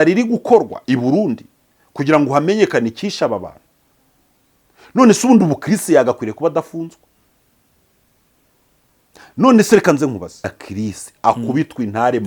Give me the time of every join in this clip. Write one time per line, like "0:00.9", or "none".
0:10.5